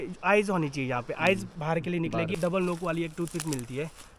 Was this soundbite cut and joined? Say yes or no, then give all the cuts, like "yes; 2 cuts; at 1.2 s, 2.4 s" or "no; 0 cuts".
yes; 1 cut; at 2.3 s